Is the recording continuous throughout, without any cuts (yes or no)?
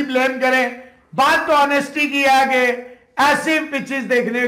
yes